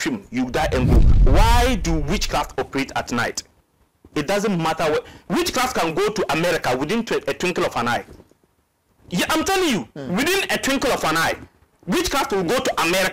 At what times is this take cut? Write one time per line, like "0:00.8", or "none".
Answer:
0:01.2